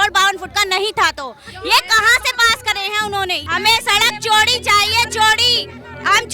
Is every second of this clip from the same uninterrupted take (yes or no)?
no